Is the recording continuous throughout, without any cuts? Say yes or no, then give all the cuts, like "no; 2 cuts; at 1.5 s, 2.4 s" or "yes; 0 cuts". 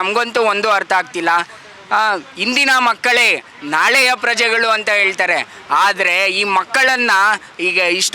yes; 0 cuts